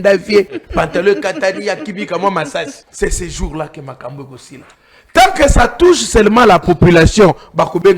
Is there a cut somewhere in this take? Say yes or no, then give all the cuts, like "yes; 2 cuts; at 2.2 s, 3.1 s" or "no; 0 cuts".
yes; 1 cut; at 2.8 s